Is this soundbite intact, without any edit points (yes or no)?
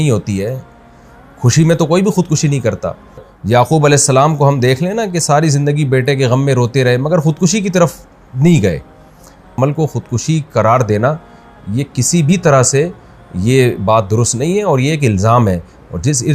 no